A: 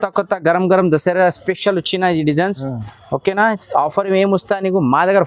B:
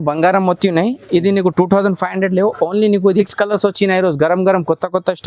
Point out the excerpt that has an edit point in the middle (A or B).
B